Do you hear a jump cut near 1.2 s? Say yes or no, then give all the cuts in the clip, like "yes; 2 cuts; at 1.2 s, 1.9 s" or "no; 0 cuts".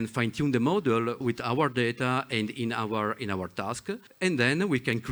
yes; 2 cuts; at 1.2 s, 4.1 s